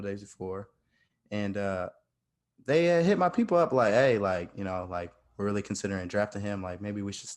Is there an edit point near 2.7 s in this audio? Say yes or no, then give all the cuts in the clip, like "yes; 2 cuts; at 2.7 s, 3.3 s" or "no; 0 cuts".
no; 0 cuts